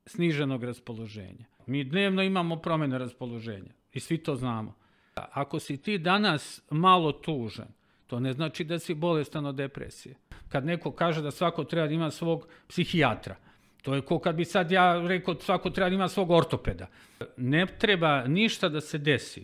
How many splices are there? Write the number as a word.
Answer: four